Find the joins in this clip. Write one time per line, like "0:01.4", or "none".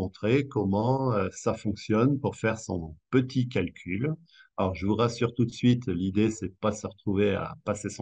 none